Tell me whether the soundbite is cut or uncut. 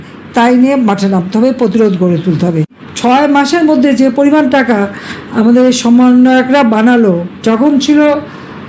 cut